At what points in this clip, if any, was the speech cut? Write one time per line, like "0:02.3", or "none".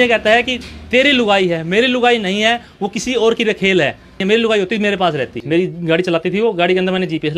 0:04.2
0:05.3